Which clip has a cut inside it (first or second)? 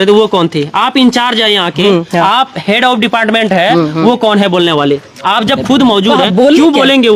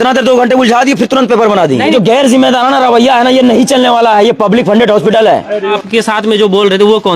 second